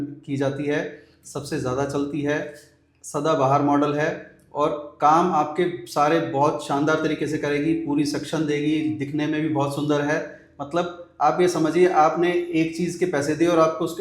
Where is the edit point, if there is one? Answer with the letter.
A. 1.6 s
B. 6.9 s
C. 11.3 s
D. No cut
D